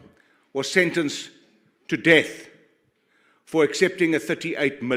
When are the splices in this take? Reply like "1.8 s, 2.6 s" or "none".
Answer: none